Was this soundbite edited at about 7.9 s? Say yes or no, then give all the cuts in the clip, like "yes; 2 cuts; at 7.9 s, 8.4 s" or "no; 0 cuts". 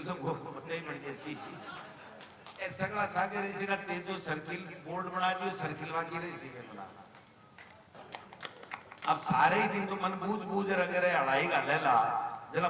yes; 1 cut; at 7.9 s